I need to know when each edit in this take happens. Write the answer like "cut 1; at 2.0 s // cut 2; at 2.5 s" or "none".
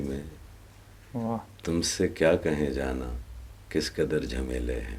none